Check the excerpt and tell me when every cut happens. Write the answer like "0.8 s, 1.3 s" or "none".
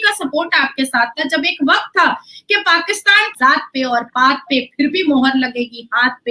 3.3 s